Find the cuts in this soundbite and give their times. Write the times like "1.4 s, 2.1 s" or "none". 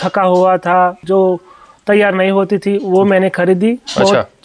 1.0 s